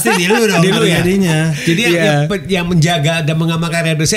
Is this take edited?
no; 0 cuts

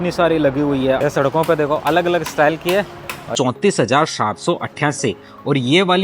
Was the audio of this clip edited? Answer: yes; 2 cuts; at 1.0 s, 3.3 s

